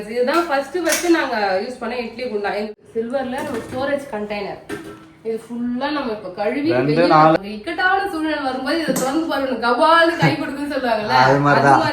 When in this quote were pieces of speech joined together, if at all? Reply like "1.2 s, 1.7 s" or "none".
2.8 s, 7.4 s